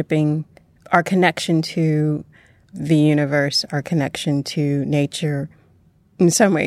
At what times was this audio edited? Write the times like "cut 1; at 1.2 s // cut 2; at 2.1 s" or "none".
none